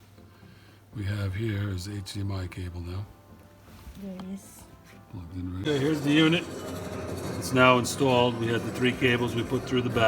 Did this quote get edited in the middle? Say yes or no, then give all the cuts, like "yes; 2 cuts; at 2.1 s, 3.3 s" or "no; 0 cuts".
yes; 1 cut; at 5.6 s